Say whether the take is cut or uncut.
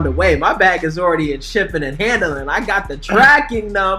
uncut